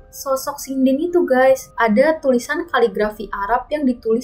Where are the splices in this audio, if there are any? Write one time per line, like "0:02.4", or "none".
0:01.7